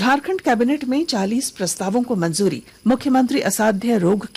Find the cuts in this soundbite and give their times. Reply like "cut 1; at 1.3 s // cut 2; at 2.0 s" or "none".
cut 1; at 2.7 s